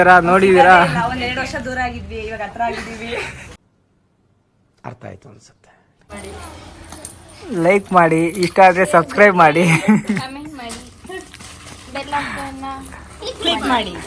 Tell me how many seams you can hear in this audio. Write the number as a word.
two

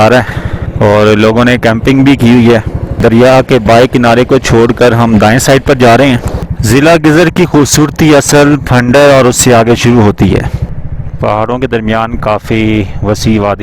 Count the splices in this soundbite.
three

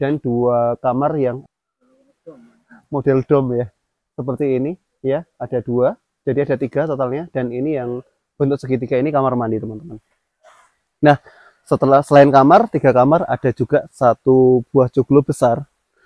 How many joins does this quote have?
one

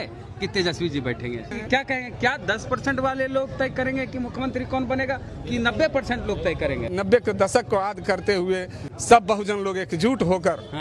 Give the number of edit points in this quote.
two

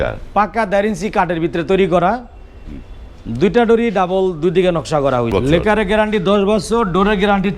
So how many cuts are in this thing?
one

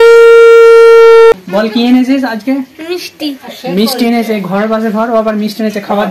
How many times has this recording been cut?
one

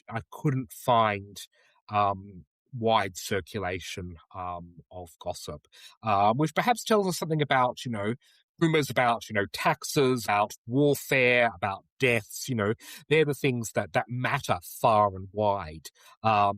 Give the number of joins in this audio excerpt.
two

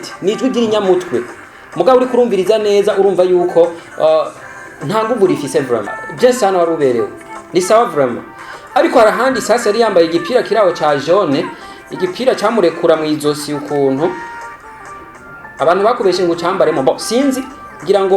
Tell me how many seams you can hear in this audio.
one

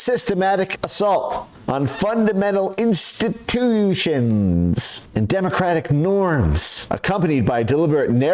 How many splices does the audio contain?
two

